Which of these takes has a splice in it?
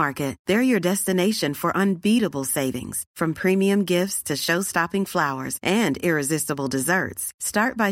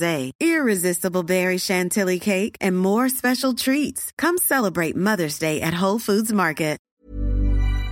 second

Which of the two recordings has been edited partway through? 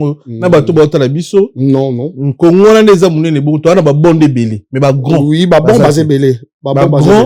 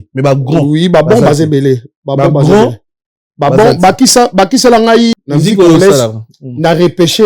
second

